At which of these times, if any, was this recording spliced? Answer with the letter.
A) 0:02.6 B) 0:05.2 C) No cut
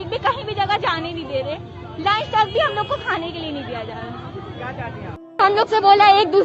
B